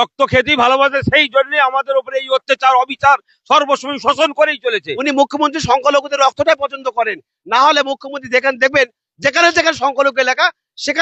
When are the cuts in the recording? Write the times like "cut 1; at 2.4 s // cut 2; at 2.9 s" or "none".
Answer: cut 1; at 5.0 s